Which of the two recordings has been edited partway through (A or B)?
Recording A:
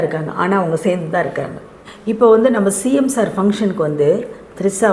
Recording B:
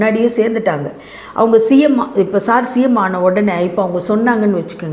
A